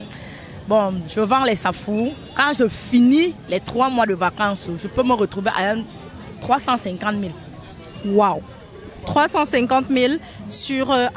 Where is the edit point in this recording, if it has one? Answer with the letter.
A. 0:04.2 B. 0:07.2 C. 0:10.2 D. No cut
D